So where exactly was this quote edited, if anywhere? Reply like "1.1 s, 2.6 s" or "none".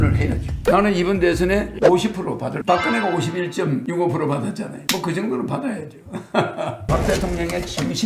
2.6 s, 6.8 s